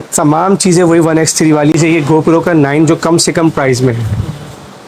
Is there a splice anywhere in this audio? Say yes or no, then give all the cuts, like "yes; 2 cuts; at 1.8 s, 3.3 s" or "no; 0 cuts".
yes; 1 cut; at 1.7 s